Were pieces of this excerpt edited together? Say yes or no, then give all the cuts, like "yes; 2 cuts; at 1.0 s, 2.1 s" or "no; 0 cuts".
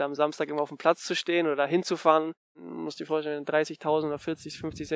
yes; 1 cut; at 2.6 s